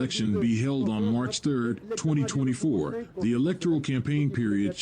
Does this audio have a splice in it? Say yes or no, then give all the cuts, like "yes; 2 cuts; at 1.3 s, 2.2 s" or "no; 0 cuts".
yes; 1 cut; at 3.1 s